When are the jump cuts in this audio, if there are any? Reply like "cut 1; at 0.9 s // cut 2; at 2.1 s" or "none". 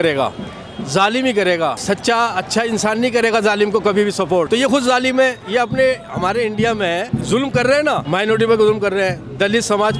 cut 1; at 1.8 s // cut 2; at 4.5 s // cut 3; at 7.1 s // cut 4; at 8.0 s